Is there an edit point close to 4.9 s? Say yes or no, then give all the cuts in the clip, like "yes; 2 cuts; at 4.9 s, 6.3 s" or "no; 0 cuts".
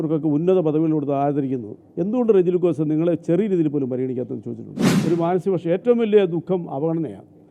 yes; 1 cut; at 4.9 s